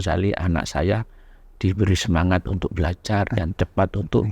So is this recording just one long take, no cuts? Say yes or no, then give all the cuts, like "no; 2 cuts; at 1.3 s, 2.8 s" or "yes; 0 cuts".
yes; 0 cuts